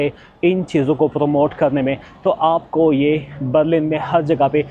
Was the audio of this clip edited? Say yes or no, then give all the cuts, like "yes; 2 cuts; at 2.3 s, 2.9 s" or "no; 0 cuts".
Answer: no; 0 cuts